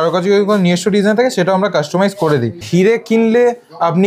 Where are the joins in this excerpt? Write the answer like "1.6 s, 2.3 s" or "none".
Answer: 2.6 s